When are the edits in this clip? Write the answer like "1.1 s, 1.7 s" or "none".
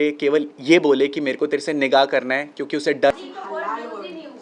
3.1 s